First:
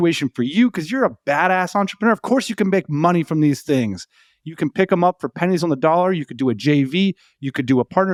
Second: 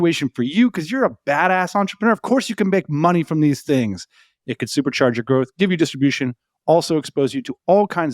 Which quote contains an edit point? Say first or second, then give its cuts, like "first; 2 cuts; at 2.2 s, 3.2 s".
second; 1 cut; at 4.4 s